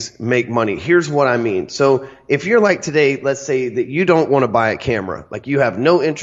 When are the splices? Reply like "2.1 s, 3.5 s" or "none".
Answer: none